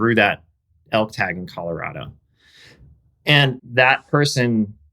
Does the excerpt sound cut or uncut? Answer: cut